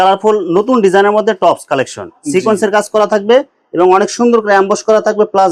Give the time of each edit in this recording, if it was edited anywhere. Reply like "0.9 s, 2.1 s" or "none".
none